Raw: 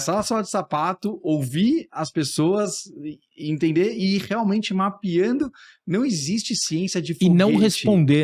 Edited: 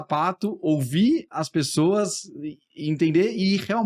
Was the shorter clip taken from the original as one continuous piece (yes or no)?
yes